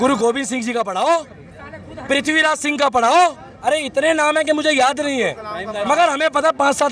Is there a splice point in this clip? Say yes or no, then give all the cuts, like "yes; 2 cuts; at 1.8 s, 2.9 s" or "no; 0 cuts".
yes; 1 cut; at 3.5 s